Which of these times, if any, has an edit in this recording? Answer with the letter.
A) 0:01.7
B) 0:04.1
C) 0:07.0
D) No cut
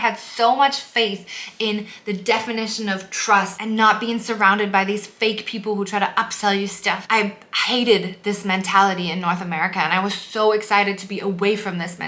C